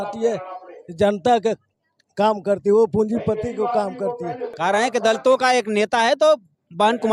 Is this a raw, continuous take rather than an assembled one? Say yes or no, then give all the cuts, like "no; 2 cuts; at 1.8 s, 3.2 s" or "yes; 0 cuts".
no; 1 cut; at 4.5 s